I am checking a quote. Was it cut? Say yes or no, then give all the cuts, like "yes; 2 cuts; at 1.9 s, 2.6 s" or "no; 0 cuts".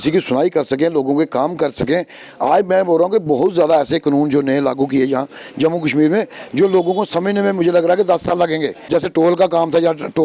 yes; 1 cut; at 8.9 s